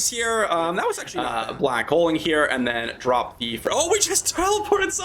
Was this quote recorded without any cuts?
no; 1 cut; at 1.1 s

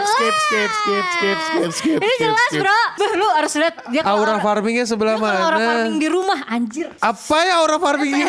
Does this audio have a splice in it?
yes; 2 cuts; at 2.9 s, 6.9 s

